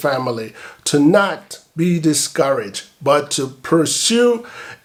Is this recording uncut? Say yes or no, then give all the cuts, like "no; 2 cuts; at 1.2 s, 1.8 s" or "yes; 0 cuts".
yes; 0 cuts